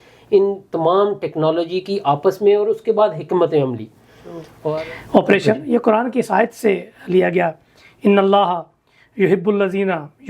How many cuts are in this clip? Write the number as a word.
one